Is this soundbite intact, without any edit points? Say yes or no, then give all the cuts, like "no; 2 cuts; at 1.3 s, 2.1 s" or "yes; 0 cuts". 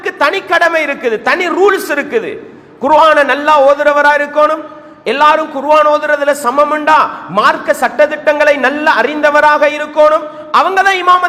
yes; 0 cuts